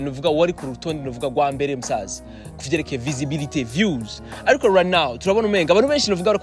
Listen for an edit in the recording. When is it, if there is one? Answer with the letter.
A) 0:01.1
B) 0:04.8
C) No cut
C